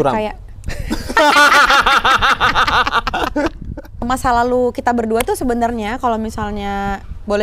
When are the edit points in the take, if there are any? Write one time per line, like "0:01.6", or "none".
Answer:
0:04.0